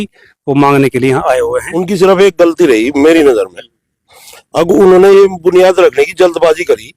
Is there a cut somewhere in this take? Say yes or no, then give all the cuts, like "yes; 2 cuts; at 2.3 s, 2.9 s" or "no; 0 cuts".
yes; 1 cut; at 1.7 s